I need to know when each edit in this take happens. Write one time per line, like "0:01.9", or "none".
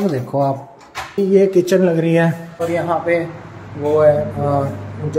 0:01.1
0:02.5